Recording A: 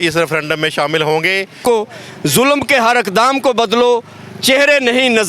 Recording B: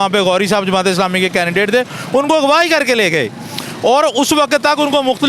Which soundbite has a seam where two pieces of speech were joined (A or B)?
A